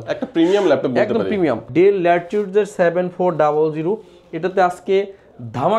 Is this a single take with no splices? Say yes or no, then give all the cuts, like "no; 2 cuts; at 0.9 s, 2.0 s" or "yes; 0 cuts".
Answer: no; 1 cut; at 1.6 s